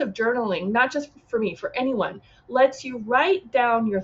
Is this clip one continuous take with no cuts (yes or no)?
yes